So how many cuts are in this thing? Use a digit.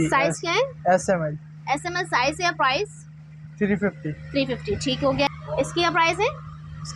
1